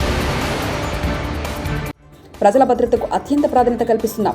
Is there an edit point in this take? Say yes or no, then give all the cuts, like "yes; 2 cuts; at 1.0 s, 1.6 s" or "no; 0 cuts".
yes; 1 cut; at 2.0 s